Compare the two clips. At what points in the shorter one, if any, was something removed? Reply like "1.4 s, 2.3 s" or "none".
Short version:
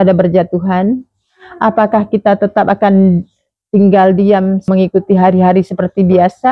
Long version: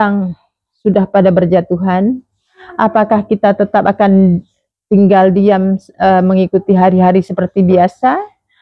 4.7 s